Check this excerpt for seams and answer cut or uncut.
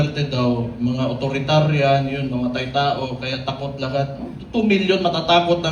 uncut